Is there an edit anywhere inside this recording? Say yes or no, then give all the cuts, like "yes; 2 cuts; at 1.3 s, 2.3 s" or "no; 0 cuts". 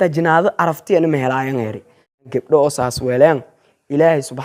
yes; 1 cut; at 2.3 s